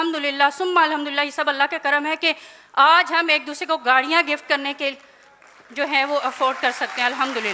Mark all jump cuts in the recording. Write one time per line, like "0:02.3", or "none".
none